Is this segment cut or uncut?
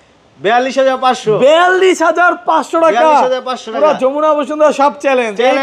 uncut